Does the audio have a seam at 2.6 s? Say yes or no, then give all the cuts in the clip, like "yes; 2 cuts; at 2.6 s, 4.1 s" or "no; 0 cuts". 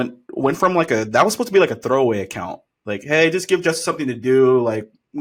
no; 0 cuts